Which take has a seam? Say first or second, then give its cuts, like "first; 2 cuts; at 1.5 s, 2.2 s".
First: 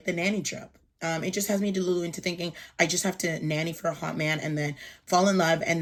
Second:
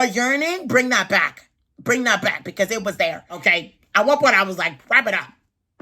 second; 1 cut; at 3.4 s